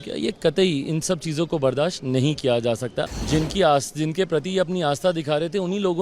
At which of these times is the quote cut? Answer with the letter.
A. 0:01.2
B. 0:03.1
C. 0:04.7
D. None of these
B